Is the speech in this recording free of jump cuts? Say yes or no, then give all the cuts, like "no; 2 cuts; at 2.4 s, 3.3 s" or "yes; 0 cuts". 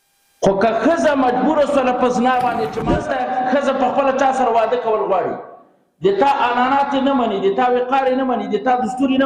no; 1 cut; at 2.9 s